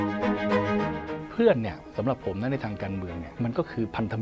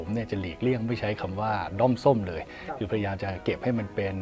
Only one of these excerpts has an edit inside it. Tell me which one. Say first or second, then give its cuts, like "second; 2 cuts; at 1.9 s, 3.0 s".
first; 2 cuts; at 1.1 s, 3.2 s